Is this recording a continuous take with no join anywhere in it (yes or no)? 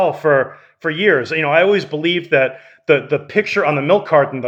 yes